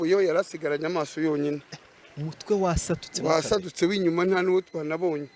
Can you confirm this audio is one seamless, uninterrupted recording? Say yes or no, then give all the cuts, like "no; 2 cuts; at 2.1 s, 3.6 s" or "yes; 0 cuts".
yes; 0 cuts